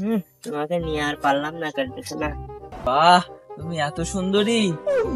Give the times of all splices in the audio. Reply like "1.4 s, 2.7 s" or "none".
2.8 s